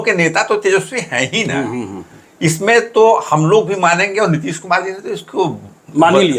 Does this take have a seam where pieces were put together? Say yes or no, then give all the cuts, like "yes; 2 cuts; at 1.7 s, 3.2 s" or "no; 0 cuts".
no; 0 cuts